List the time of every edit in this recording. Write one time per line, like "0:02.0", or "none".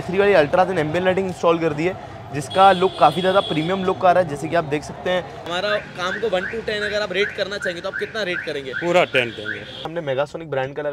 0:05.4
0:09.9